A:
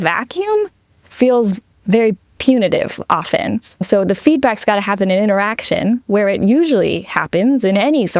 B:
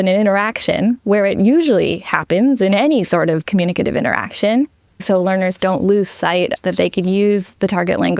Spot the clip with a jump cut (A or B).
B